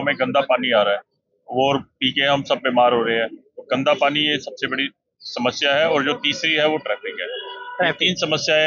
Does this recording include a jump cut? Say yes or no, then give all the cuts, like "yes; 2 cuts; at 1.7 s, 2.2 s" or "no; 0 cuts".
no; 0 cuts